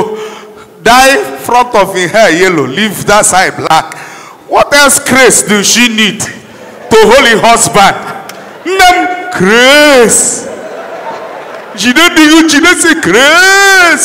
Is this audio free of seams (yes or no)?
yes